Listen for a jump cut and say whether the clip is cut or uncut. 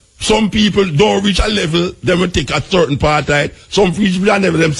uncut